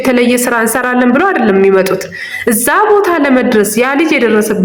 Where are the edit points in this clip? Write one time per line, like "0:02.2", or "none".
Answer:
none